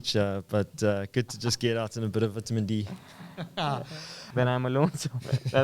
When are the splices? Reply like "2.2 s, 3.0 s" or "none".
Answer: 4.3 s